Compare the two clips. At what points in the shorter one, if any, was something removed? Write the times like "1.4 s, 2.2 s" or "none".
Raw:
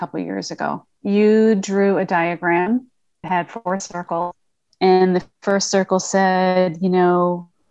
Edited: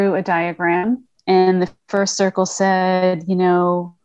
1.1 s